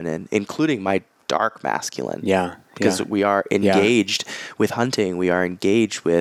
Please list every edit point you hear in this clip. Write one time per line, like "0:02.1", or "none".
none

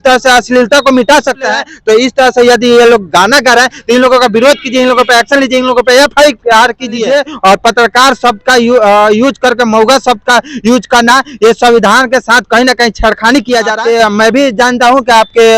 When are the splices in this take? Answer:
0:01.7
0:07.0
0:13.8

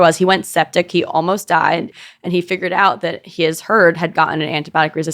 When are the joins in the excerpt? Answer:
0:02.0

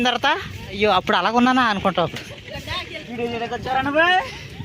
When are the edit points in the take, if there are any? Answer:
0:00.8
0:03.0

